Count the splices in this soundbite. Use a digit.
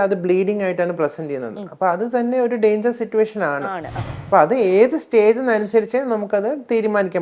1